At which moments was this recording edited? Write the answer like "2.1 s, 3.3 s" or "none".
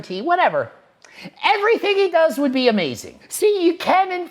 3.2 s